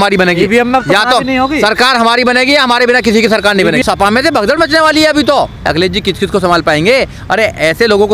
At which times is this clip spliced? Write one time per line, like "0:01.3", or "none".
0:03.8
0:05.7